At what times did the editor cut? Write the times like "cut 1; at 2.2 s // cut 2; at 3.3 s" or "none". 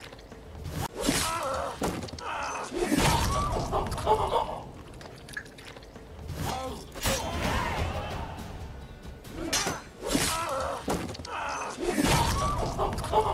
cut 1; at 0.9 s // cut 2; at 6.5 s